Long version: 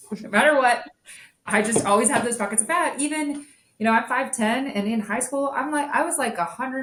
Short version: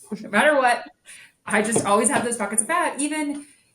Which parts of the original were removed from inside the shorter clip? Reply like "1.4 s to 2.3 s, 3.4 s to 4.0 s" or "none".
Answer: none